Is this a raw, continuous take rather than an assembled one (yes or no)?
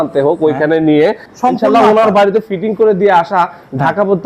no